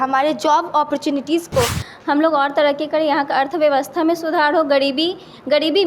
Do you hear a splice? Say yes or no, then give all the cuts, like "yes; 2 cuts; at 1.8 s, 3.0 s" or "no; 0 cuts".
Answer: yes; 1 cut; at 1.8 s